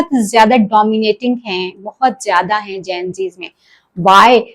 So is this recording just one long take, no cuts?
yes; 0 cuts

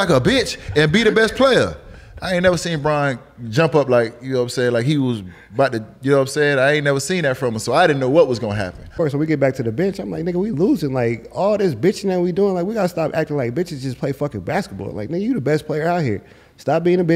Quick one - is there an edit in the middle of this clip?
yes; 1 cut; at 8.9 s

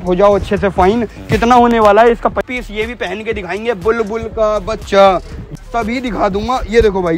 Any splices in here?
yes; 2 cuts; at 2.4 s, 5.5 s

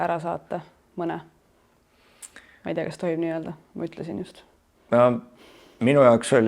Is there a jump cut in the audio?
no; 0 cuts

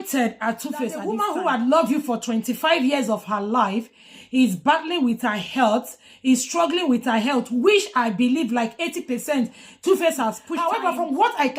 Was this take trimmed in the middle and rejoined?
yes; 2 cuts; at 1.2 s, 10.5 s

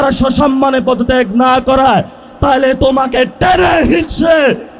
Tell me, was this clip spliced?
no; 0 cuts

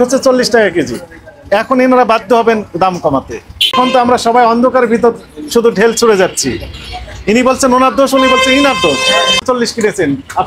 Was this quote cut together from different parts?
yes; 2 cuts; at 3.7 s, 9.4 s

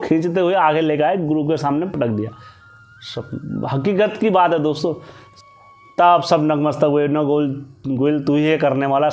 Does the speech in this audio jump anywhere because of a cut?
yes; 2 cuts; at 2.7 s, 5.5 s

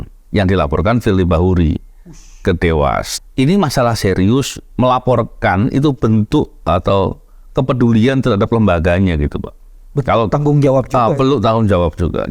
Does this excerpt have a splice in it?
yes; 1 cut; at 3.1 s

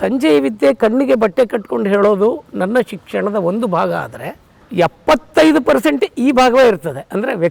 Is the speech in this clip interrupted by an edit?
no; 0 cuts

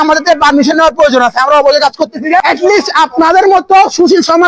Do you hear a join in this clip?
yes; 1 cut; at 2.4 s

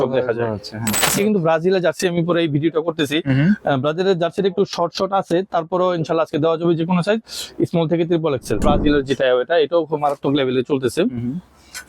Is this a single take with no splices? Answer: no; 2 cuts; at 1.0 s, 8.6 s

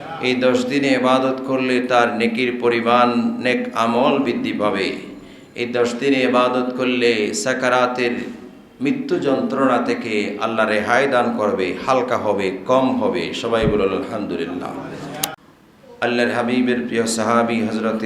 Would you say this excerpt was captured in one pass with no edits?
no; 1 cut; at 15.3 s

